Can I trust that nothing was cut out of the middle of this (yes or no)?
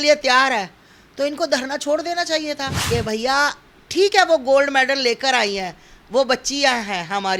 no